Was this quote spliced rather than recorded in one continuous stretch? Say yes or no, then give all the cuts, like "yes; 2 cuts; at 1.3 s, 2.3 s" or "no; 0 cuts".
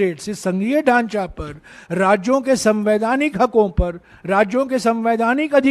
no; 0 cuts